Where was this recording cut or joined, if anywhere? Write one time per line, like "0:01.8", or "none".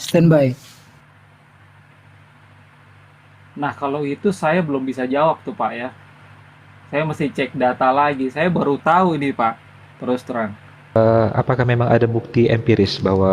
0:11.0